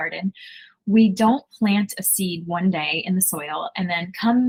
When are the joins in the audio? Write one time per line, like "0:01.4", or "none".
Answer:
none